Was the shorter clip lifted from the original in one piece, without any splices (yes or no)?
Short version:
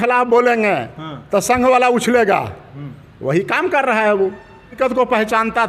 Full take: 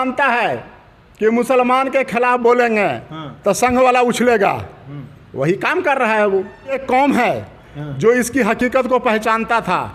no